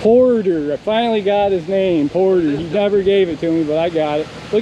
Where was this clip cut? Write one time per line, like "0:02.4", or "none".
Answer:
none